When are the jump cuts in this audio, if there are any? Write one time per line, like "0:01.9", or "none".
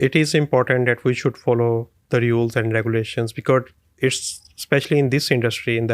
none